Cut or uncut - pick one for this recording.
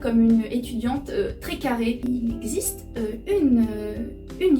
cut